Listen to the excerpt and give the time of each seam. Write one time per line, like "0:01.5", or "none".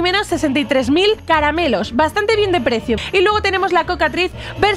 0:01.2
0:03.0